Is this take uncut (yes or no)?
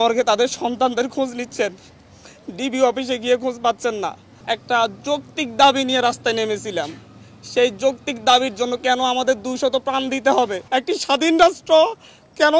no